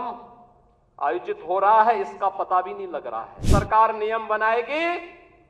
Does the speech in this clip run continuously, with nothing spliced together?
no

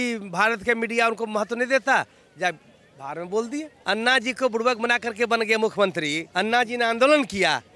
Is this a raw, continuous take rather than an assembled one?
no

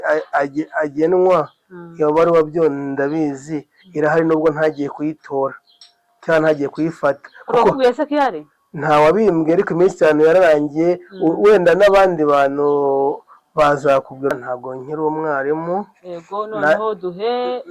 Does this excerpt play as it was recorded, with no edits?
no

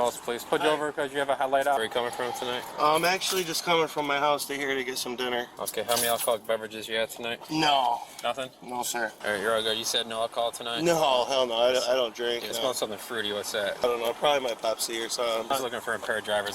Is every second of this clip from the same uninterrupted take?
no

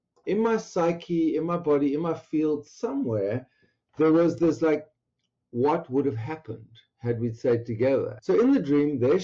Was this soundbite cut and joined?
yes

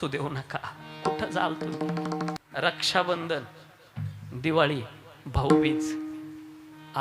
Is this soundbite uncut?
no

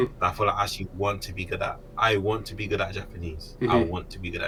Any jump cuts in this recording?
no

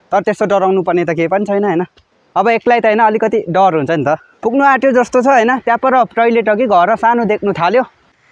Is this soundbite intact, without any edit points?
yes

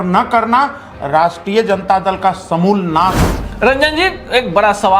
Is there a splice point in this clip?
yes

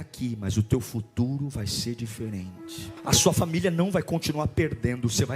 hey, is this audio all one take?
no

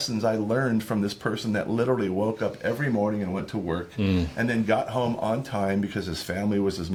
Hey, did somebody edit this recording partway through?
no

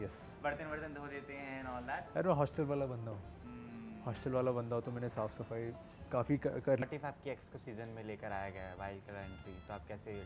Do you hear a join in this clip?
yes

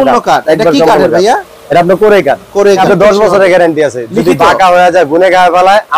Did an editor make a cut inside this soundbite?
yes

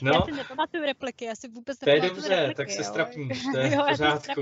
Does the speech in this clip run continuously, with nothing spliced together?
yes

